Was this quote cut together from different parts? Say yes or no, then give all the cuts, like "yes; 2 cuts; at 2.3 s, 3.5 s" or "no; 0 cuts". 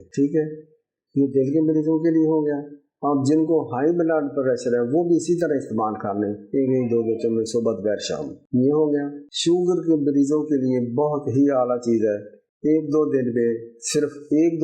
yes; 1 cut; at 9.2 s